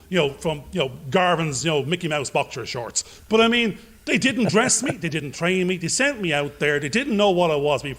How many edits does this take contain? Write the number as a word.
zero